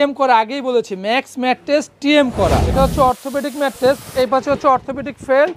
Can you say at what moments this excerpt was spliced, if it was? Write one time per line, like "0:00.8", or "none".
0:02.7
0:04.1